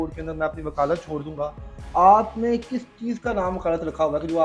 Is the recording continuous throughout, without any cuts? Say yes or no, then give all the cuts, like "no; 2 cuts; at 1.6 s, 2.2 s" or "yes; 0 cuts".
yes; 0 cuts